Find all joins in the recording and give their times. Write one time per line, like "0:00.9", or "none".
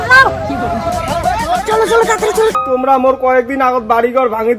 0:02.5